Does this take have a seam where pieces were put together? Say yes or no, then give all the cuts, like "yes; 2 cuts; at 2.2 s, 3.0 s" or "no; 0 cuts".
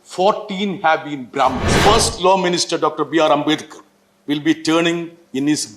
yes; 1 cut; at 1.7 s